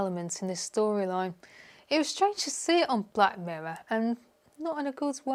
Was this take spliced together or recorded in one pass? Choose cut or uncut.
uncut